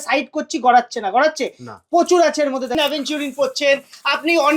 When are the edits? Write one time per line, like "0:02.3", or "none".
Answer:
0:02.8